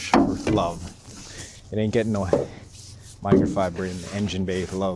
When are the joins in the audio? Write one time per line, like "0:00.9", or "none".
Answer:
none